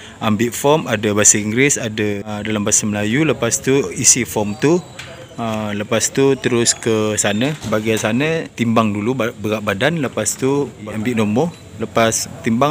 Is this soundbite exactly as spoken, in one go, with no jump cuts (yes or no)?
no